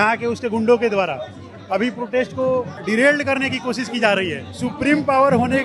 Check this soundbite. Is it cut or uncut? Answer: cut